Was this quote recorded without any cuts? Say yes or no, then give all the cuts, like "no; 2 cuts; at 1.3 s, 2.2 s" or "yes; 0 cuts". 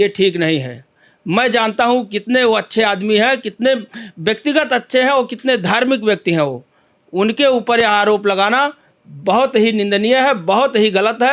yes; 0 cuts